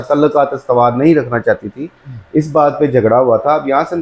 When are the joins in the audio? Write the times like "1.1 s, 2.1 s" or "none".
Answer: none